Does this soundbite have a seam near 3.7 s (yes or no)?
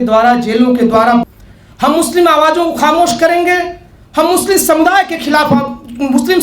no